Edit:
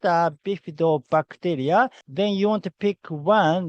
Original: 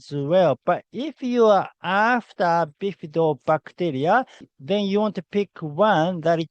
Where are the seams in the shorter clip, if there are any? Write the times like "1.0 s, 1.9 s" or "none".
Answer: 2.0 s